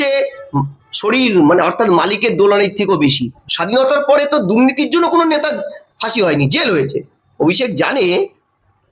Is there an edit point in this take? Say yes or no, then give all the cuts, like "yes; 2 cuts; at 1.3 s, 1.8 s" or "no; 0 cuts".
yes; 1 cut; at 3.4 s